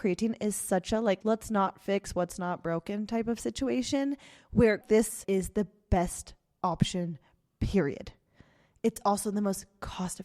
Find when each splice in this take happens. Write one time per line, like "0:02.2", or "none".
0:04.9